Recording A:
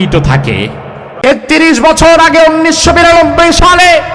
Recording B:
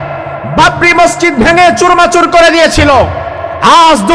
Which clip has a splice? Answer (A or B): A